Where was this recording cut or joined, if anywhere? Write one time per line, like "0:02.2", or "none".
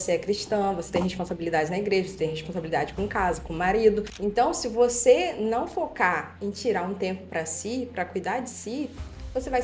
0:04.1